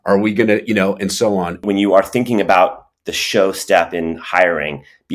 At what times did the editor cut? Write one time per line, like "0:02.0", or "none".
0:01.6